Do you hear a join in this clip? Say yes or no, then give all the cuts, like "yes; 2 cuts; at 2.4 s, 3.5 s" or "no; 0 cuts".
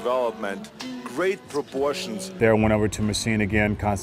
yes; 1 cut; at 2.3 s